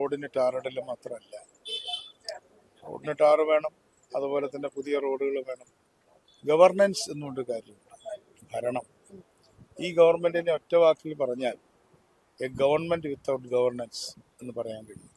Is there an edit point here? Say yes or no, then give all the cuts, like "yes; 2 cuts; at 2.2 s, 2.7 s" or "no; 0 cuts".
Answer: no; 0 cuts